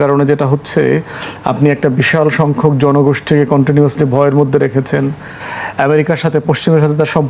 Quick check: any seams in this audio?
no; 0 cuts

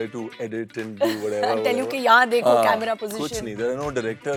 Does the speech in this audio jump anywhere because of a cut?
no; 0 cuts

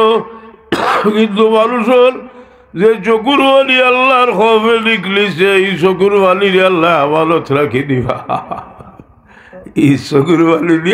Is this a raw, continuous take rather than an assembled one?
yes; 0 cuts

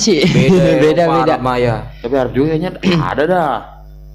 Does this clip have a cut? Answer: no; 0 cuts

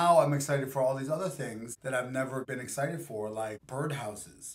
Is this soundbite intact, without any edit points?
no; 3 cuts; at 1.7 s, 2.5 s, 3.6 s

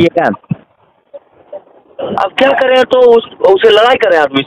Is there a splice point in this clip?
no; 0 cuts

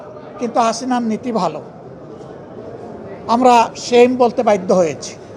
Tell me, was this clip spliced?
no; 0 cuts

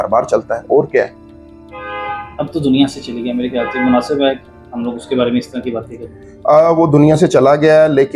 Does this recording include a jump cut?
no; 0 cuts

